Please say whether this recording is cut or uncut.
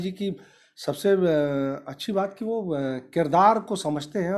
uncut